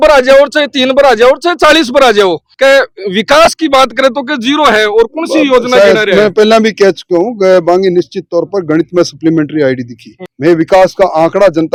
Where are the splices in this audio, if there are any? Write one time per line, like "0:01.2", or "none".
none